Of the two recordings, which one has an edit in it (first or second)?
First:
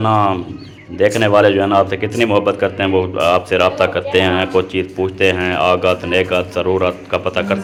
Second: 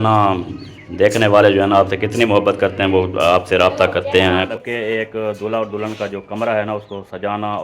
second